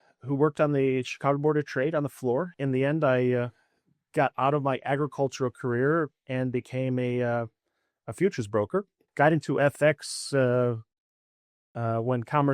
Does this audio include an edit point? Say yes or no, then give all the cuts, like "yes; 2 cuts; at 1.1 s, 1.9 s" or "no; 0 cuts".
yes; 2 cuts; at 2.5 s, 9.0 s